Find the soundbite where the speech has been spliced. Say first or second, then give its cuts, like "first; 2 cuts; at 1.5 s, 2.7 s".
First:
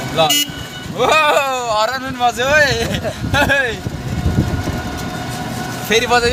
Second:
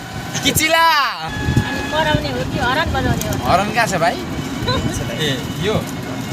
second; 1 cut; at 1.3 s